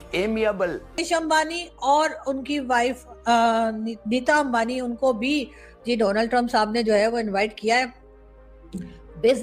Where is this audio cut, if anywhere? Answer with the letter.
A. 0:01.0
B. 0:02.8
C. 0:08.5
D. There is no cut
A